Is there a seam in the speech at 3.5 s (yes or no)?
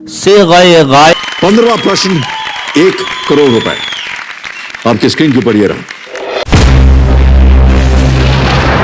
no